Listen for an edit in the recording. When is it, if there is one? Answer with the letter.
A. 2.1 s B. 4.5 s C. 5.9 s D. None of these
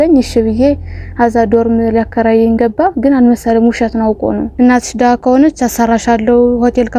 B